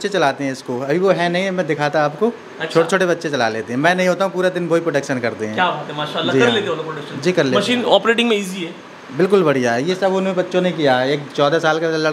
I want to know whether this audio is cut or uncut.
uncut